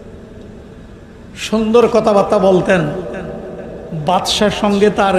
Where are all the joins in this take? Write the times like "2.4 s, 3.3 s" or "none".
none

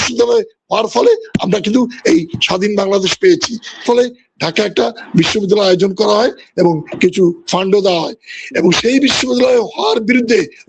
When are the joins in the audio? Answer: 3.8 s

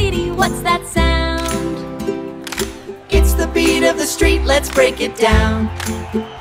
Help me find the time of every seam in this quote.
none

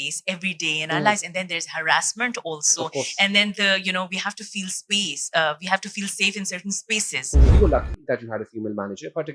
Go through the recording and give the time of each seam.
7.5 s

